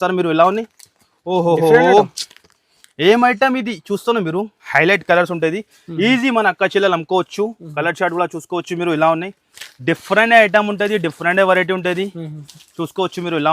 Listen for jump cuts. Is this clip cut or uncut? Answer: cut